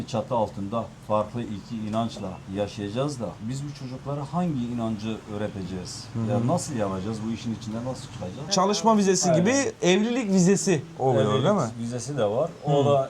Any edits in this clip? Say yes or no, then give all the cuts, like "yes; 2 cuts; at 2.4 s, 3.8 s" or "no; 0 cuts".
yes; 2 cuts; at 1.0 s, 8.5 s